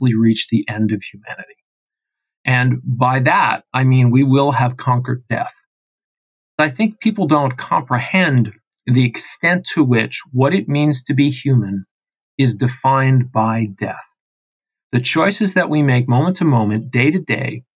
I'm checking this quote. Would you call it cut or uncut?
cut